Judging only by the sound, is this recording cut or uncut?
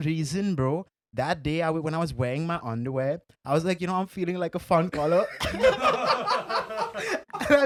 uncut